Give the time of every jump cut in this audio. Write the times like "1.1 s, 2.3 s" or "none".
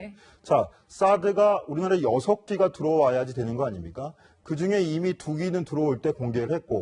3.9 s